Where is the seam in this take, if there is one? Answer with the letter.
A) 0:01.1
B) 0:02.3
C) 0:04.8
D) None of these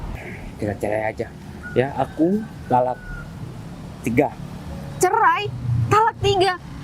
D